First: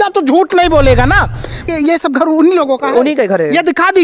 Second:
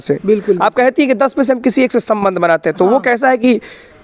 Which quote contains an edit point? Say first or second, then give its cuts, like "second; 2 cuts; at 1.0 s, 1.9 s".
first; 1 cut; at 1.7 s